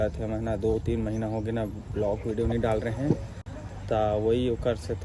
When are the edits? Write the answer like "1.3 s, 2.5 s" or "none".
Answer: none